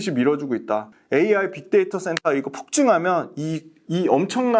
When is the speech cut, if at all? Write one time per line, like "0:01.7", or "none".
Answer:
0:00.9